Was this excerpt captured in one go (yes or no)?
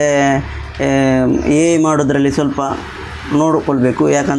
yes